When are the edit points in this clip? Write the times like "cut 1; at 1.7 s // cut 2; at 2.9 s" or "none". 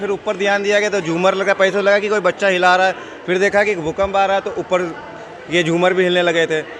none

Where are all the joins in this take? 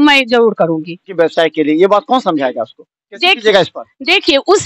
cut 1; at 1.1 s

